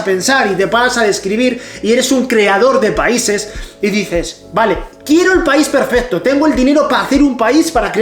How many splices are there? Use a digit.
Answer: 0